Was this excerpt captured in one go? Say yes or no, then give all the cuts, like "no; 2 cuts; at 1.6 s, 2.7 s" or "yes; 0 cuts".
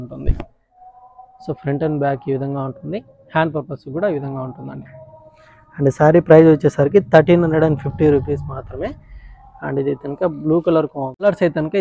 yes; 0 cuts